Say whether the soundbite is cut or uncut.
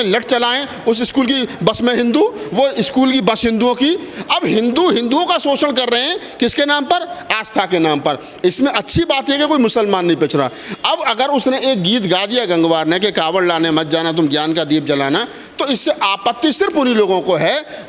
uncut